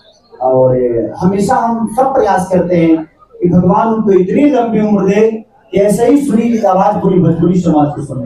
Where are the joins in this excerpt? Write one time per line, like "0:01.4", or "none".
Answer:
none